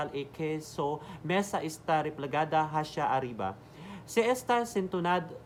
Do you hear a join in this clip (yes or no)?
no